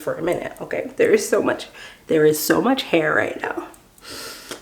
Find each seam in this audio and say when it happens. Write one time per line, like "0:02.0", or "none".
none